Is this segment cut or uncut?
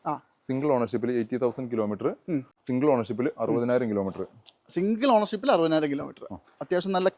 cut